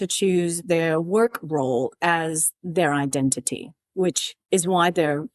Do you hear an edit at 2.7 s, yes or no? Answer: no